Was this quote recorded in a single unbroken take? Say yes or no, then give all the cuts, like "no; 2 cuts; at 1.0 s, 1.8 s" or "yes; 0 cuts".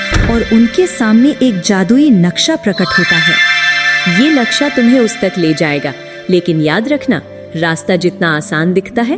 yes; 0 cuts